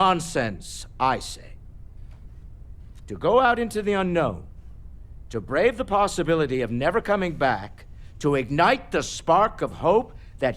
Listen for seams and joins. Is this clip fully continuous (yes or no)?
yes